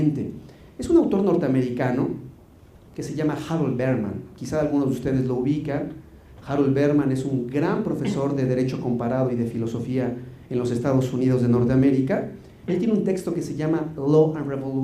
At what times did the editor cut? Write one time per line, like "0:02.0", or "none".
0:04.1